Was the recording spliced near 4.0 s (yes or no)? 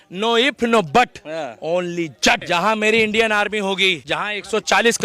yes